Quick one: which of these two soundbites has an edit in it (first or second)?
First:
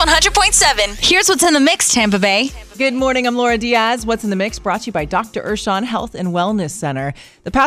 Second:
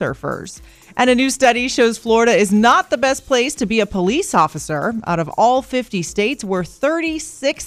first